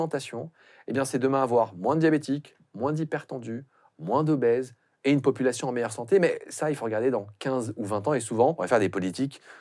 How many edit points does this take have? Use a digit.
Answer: 1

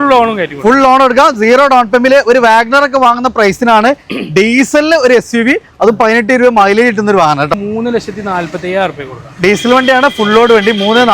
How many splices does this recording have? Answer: 1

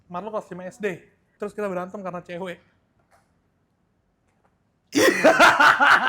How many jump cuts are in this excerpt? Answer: 2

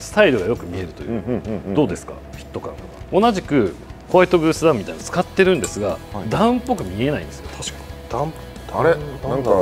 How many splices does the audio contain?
1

